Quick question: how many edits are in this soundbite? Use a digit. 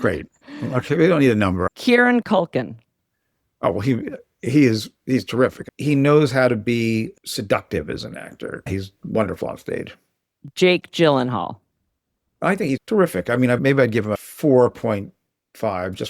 3